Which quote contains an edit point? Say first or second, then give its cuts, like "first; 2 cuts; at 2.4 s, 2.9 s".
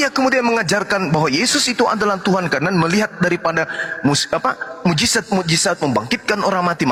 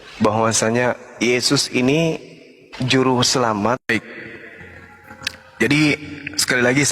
second; 1 cut; at 3.9 s